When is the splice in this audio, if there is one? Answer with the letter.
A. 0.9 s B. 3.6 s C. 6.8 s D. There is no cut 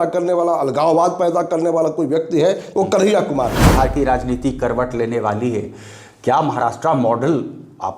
B